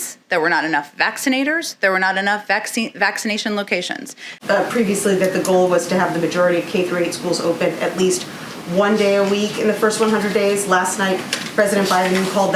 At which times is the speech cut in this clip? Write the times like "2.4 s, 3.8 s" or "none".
4.4 s